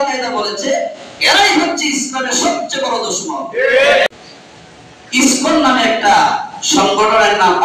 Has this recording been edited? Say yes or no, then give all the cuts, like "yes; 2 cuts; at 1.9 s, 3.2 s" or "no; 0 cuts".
yes; 1 cut; at 4.1 s